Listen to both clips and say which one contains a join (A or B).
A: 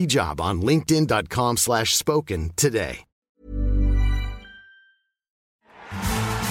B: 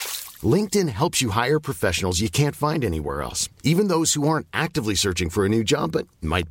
A